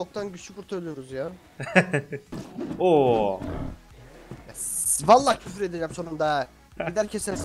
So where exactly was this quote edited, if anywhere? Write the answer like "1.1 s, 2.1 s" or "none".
2.5 s